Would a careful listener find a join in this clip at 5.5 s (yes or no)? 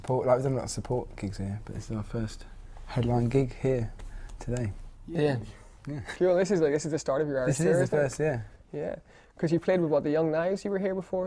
yes